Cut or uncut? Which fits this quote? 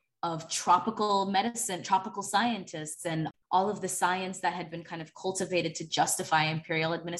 cut